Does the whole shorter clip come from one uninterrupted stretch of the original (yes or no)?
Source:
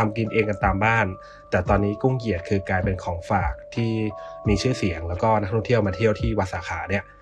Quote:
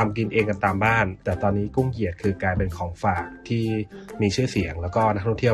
no